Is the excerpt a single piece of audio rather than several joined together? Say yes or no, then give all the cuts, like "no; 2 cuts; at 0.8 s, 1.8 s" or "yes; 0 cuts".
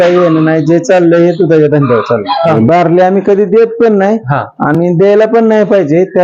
no; 1 cut; at 2.4 s